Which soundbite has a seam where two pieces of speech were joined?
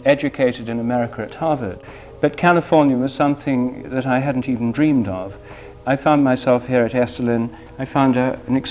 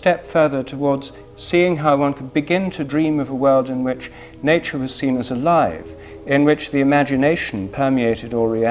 first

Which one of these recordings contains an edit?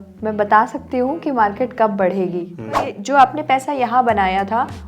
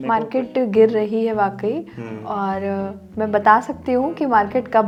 first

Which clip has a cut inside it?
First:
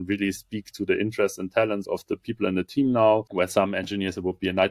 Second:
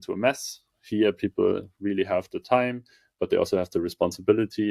first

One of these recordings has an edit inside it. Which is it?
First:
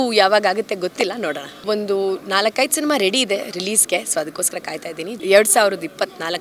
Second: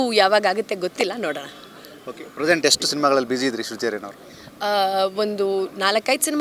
first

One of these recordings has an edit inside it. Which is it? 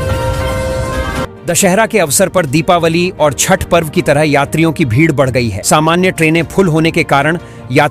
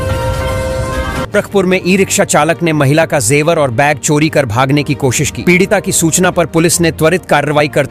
first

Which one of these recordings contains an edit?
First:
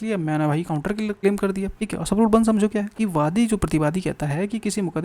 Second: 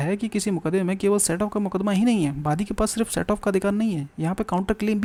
first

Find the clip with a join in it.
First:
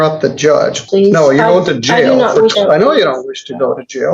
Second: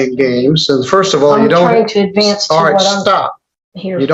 first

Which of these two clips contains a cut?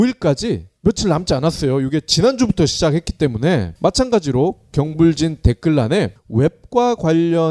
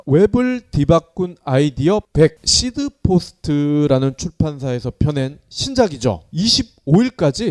second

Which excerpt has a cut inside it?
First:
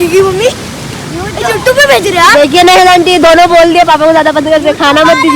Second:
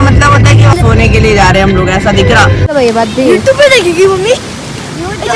second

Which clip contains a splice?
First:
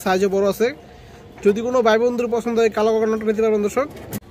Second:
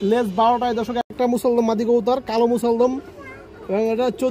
second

